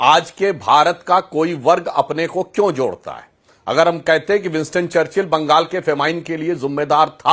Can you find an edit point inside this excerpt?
no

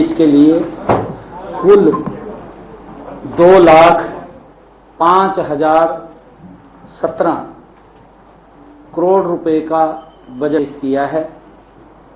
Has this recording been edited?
yes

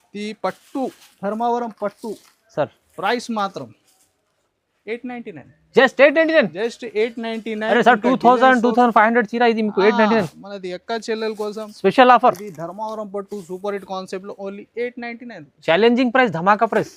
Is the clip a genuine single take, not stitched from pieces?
yes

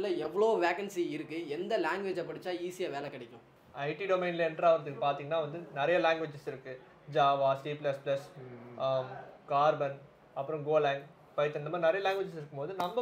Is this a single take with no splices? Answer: yes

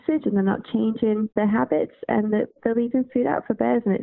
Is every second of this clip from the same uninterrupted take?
no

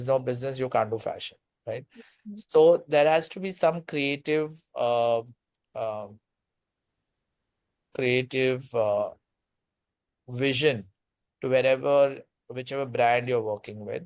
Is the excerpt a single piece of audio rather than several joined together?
yes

